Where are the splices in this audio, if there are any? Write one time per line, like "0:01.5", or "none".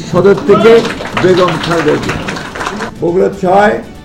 0:02.9